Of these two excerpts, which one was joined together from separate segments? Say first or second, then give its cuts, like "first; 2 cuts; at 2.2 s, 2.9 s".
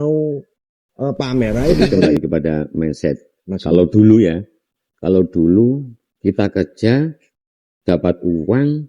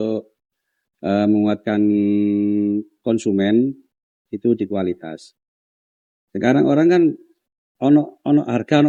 first; 1 cut; at 1.9 s